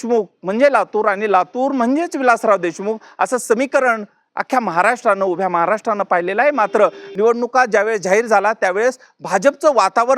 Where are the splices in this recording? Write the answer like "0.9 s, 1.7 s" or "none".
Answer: 7.0 s